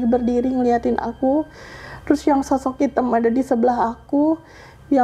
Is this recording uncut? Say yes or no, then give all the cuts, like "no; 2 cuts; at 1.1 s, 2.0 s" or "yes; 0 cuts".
yes; 0 cuts